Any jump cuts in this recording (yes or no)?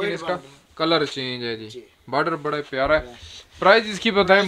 no